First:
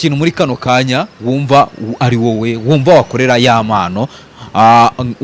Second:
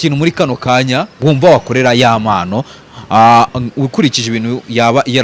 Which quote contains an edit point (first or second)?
second